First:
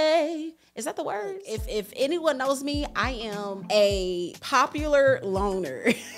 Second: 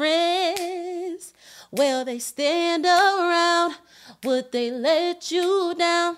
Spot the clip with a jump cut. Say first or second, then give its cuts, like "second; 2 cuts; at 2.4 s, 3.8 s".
first; 3 cuts; at 1.4 s, 3.6 s, 4.4 s